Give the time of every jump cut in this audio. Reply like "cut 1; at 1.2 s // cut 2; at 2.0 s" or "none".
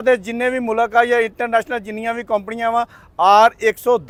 none